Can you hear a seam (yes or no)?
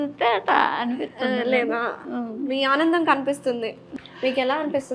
yes